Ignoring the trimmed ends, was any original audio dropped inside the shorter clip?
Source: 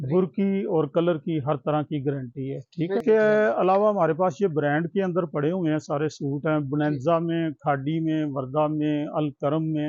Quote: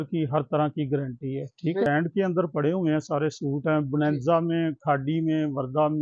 yes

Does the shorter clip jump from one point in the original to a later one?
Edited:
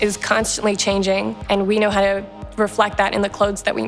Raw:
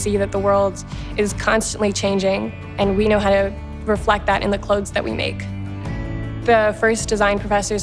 yes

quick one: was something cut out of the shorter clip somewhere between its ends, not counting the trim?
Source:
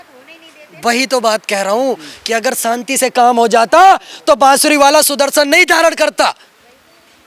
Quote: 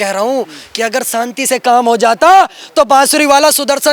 no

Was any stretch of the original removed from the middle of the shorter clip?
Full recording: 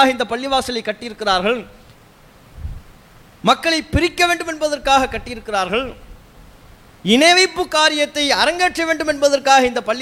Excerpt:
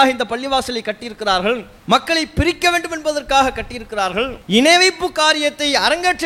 yes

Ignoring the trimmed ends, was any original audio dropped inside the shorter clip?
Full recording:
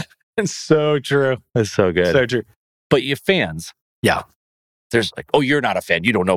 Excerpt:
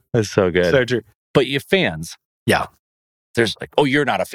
yes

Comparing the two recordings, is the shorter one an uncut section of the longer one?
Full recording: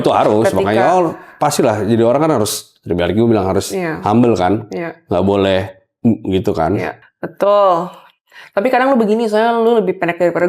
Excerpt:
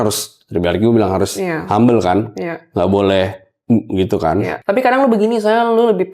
no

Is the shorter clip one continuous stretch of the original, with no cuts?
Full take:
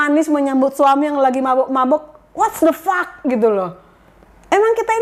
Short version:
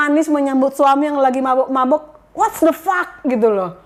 yes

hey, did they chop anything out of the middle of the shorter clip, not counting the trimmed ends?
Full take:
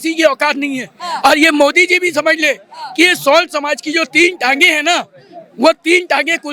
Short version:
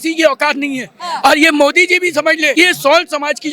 yes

